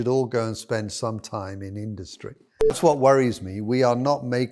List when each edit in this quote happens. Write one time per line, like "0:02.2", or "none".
0:02.8